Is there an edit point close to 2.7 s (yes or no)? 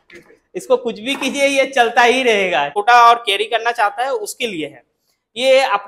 yes